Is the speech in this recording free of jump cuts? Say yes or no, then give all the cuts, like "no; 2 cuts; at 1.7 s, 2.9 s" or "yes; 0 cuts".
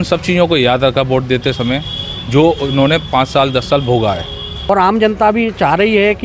no; 1 cut; at 4.7 s